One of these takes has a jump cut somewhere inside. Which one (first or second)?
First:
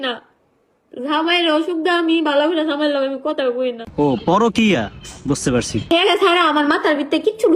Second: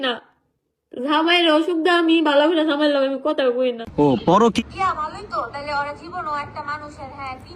second